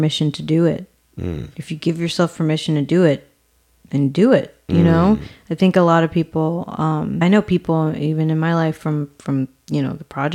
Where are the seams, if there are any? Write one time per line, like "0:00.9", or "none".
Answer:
0:07.2